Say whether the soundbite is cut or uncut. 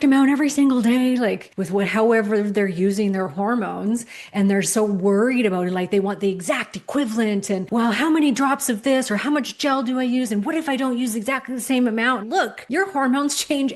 cut